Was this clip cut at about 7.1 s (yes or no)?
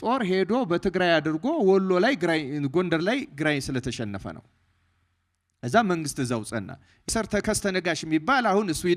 yes